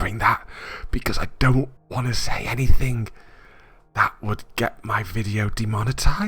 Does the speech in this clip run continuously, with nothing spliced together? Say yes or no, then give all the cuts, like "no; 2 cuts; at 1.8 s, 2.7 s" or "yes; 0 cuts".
no; 1 cut; at 1.8 s